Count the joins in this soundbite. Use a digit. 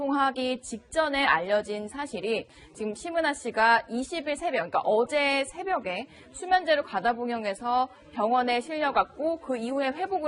0